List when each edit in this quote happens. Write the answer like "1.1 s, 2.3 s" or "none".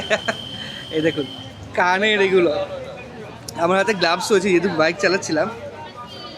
none

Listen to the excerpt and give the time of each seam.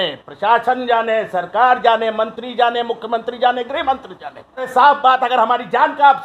4.7 s

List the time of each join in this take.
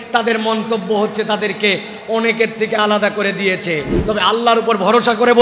4.0 s

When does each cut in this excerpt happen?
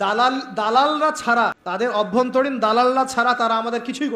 1.2 s

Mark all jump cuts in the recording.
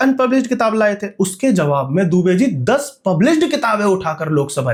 none

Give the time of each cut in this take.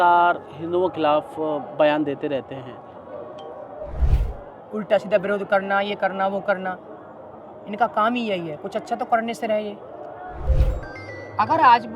4.0 s, 10.4 s

